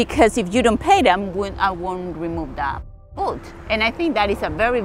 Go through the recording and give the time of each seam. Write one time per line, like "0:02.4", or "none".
none